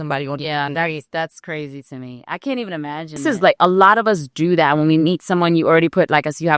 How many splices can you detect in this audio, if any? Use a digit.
1